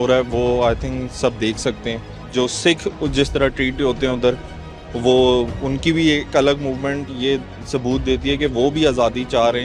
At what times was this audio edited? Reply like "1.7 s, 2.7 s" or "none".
none